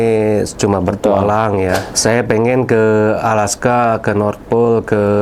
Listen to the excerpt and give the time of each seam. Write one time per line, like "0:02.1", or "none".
0:01.9